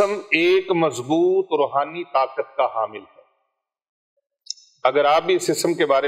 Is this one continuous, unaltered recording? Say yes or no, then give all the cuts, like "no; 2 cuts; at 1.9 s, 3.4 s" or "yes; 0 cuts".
yes; 0 cuts